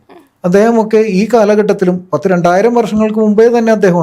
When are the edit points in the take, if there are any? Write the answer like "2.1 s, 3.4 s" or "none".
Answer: none